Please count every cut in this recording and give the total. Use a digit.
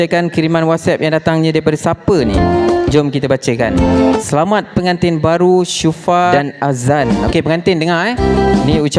1